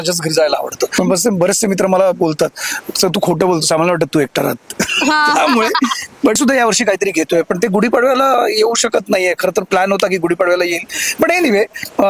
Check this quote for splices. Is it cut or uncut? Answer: cut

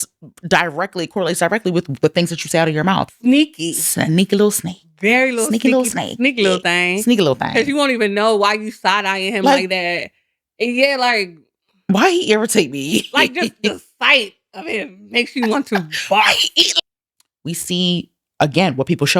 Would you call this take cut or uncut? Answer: cut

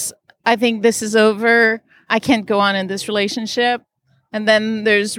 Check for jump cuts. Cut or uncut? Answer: cut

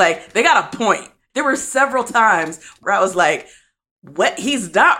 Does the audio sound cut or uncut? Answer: cut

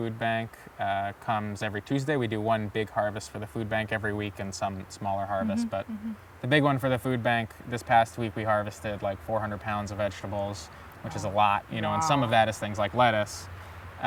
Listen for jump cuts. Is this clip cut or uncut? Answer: uncut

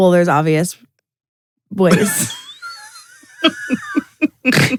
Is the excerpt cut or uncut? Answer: uncut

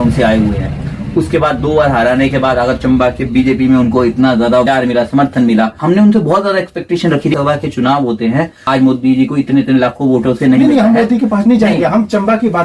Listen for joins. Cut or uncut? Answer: cut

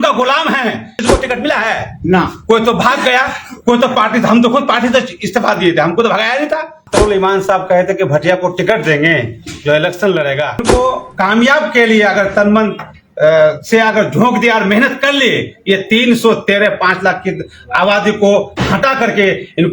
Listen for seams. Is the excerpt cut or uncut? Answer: cut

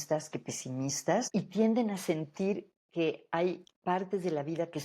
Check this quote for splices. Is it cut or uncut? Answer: cut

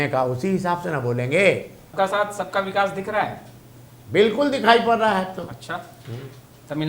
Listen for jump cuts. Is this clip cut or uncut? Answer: cut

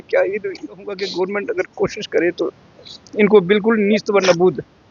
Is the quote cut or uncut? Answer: cut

